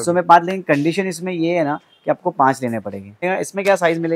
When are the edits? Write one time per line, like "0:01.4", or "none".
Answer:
0:03.2